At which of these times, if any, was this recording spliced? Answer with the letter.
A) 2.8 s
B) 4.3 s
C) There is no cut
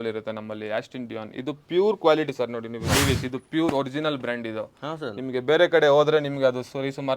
A